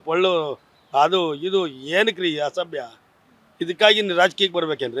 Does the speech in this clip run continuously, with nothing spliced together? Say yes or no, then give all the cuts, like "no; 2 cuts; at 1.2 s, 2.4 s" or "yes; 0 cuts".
yes; 0 cuts